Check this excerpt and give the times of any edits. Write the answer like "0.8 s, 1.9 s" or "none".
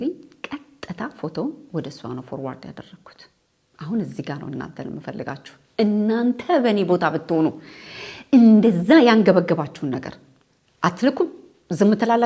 none